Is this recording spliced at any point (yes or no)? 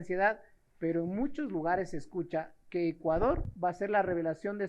yes